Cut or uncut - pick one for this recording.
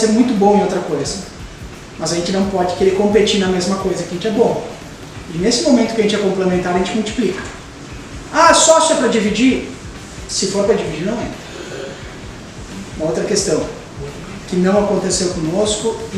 uncut